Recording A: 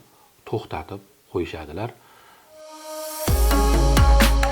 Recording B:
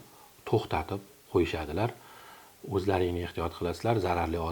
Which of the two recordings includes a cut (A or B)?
A